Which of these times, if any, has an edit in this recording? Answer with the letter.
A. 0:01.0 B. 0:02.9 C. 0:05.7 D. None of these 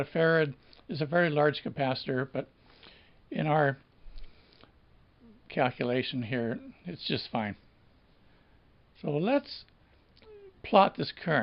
C